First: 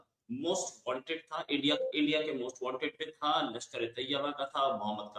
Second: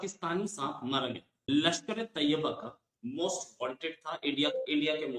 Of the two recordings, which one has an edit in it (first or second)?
second